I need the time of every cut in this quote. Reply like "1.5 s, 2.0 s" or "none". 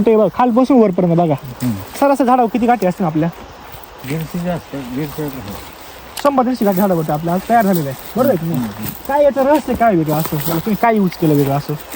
none